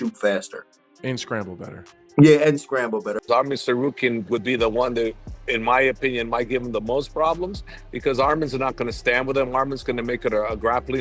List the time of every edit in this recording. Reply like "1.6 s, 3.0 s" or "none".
3.1 s